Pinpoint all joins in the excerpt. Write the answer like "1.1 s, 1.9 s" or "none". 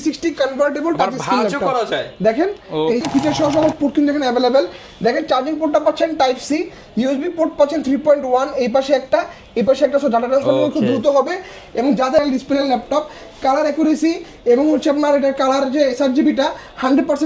3.0 s, 12.2 s